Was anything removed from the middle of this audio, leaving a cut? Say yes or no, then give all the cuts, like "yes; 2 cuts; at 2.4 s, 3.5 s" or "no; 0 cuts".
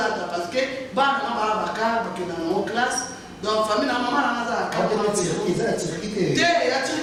no; 0 cuts